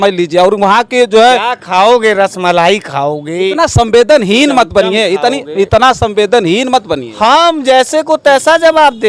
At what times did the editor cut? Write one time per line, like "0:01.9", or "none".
none